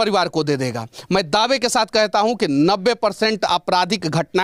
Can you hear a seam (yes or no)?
no